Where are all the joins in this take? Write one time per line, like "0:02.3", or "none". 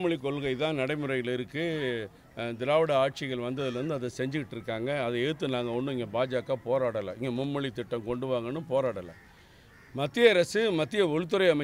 none